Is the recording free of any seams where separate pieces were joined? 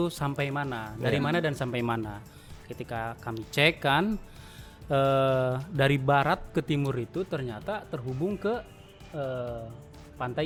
yes; 0 cuts

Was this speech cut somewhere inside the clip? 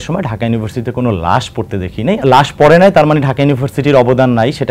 yes; 1 cut; at 2.2 s

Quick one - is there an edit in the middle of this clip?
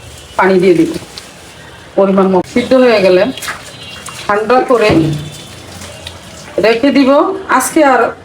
yes; 1 cut; at 2.5 s

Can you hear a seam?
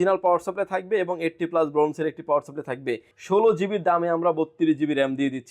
yes; 1 cut; at 3.1 s

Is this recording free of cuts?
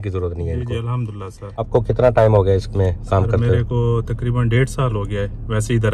no; 1 cut; at 1.7 s

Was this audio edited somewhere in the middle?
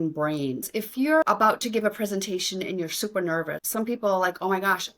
yes; 2 cuts; at 1.2 s, 3.6 s

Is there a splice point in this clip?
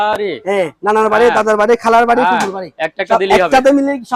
no; 0 cuts

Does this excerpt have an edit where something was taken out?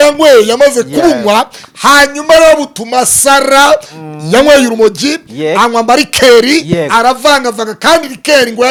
no; 0 cuts

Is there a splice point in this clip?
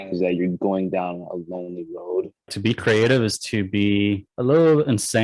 yes; 2 cuts; at 2.5 s, 4.3 s

